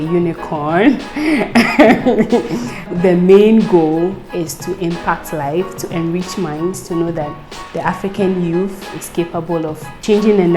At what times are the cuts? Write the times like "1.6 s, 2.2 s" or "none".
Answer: 2.9 s